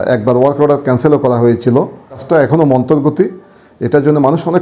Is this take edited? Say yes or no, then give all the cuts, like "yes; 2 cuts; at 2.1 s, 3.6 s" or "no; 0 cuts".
yes; 1 cut; at 2.2 s